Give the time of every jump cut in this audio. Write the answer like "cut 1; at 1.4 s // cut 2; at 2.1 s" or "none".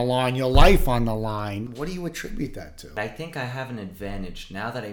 cut 1; at 1.7 s // cut 2; at 2.9 s

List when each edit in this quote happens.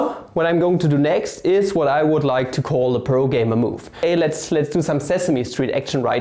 cut 1; at 4.0 s

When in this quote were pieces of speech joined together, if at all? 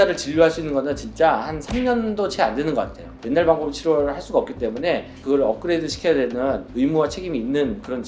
cut 1; at 3.2 s // cut 2; at 5.2 s

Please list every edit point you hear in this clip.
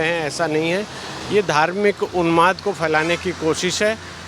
none

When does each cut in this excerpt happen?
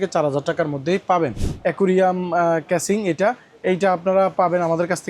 cut 1; at 1.5 s

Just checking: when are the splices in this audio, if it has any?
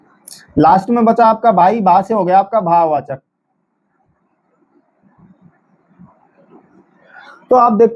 cut 1; at 1.6 s

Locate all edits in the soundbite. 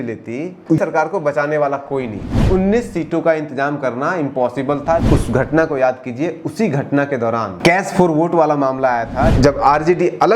cut 1; at 0.8 s // cut 2; at 2.3 s // cut 3; at 5.0 s // cut 4; at 7.5 s // cut 5; at 9.3 s

